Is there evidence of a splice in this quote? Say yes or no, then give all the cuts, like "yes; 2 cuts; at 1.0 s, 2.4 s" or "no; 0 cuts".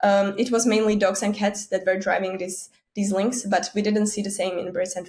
no; 0 cuts